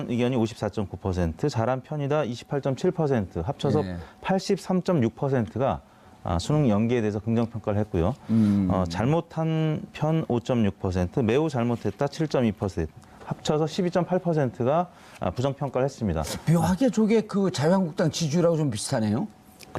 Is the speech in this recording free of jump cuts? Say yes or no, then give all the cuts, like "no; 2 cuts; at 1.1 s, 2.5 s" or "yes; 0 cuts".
yes; 0 cuts